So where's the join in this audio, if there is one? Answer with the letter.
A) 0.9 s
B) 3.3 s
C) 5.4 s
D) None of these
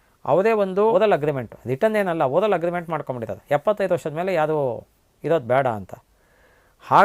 A